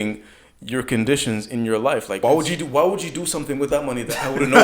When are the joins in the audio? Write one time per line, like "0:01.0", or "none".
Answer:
0:02.2